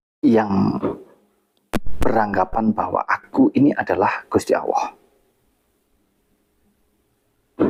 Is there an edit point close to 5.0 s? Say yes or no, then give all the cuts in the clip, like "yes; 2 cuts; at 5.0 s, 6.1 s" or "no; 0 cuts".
no; 0 cuts